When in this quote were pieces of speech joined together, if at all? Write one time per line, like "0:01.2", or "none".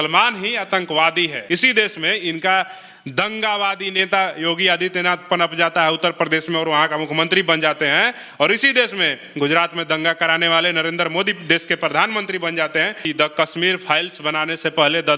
0:01.4
0:13.0